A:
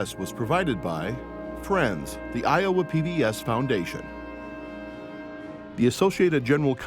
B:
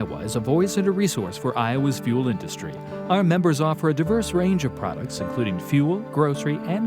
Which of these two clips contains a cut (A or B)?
A